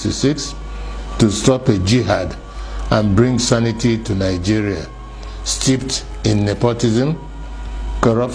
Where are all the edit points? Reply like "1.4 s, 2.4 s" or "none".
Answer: none